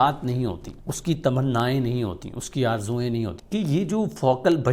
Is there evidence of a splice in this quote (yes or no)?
yes